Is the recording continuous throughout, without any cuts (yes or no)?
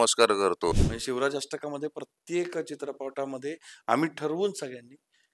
no